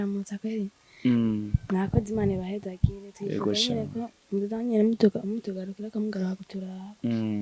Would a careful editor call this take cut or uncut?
uncut